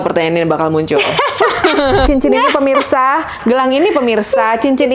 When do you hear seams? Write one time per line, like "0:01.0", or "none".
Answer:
0:02.1